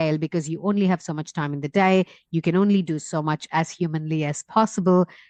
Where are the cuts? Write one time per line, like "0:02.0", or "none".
none